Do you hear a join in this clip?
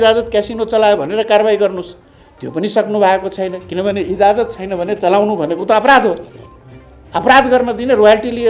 no; 0 cuts

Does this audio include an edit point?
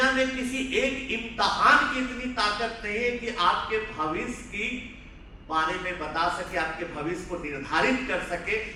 no; 0 cuts

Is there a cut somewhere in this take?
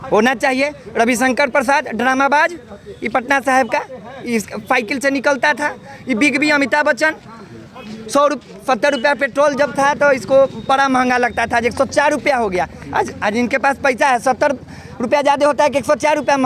no; 0 cuts

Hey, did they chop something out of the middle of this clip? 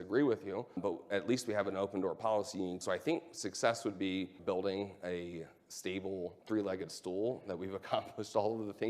yes; 4 cuts; at 0.8 s, 2.8 s, 4.4 s, 6.4 s

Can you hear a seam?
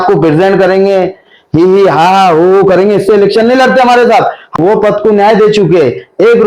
yes; 1 cut; at 4.6 s

